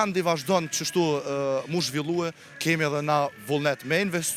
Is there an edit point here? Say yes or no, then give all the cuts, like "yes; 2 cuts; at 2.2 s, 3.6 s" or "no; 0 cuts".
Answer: no; 0 cuts